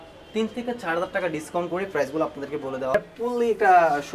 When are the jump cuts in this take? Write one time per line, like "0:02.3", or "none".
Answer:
0:02.9